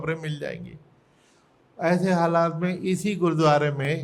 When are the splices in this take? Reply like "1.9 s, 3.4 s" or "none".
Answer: none